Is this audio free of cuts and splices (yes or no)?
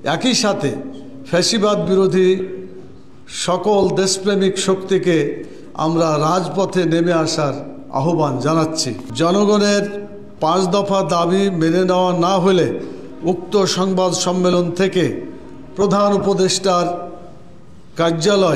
no